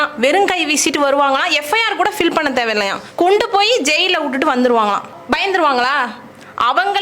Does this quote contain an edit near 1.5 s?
no; 2 cuts; at 3.0 s, 5.2 s

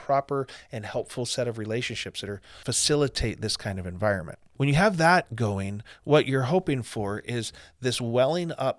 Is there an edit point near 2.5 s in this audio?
yes; 2 cuts; at 2.5 s, 4.4 s

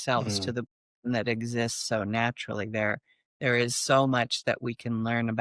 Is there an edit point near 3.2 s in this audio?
no; 0 cuts

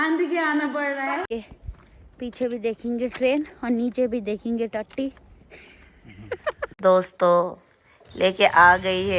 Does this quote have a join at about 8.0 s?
no; 2 cuts; at 1.3 s, 6.8 s

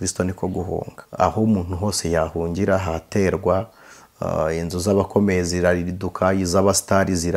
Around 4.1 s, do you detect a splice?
no; 1 cut; at 1.0 s

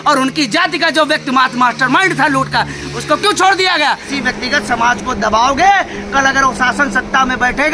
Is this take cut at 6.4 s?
no; 1 cut; at 4.1 s

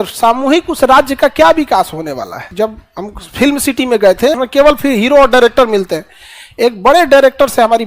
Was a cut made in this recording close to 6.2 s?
no; 2 cuts; at 2.4 s, 4.4 s

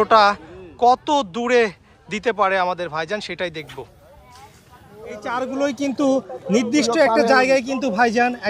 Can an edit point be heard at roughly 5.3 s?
yes; 1 cut; at 5.3 s

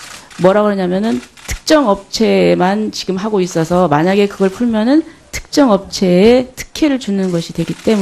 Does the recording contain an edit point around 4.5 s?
yes; 1 cut; at 4.5 s

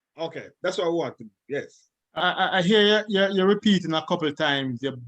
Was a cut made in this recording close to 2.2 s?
yes; 1 cut; at 2.2 s

